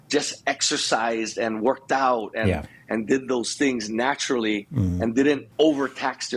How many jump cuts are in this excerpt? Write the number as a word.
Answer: one